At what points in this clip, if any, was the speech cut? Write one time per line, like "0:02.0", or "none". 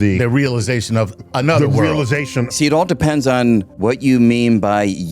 0:02.4
0:03.7

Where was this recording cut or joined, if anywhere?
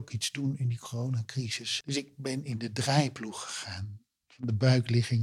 0:01.6

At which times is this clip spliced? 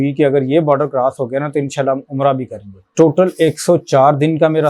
0:02.9

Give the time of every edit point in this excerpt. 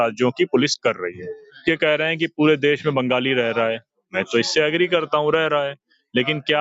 0:01.4

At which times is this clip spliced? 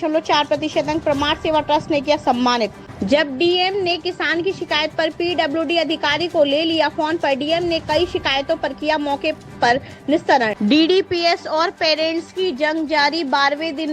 0:02.9
0:10.5

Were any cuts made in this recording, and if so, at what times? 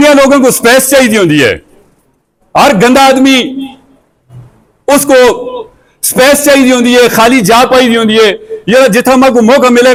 none

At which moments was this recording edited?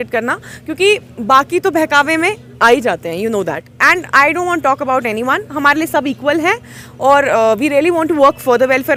none

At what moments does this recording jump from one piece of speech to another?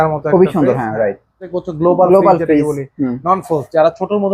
0:01.6

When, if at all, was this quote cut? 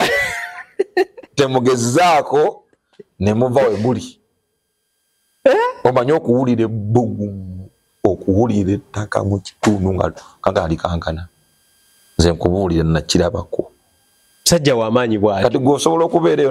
none

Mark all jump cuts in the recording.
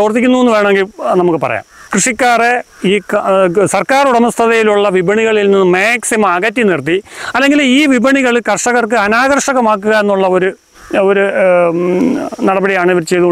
0:01.8

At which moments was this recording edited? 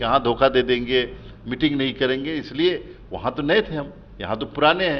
none

